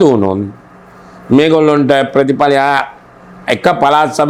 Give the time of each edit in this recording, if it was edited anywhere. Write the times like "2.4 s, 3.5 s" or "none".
none